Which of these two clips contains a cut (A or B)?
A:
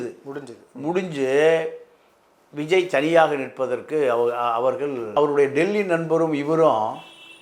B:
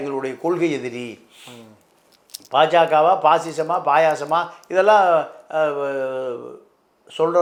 A